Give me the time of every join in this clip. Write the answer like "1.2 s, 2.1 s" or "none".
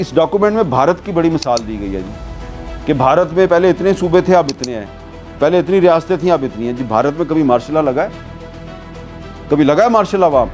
none